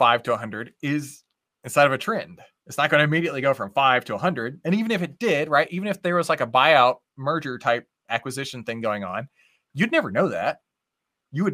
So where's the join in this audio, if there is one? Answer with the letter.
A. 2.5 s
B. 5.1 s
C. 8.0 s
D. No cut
D